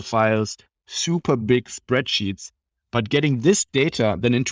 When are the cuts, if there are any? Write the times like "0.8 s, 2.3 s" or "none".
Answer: none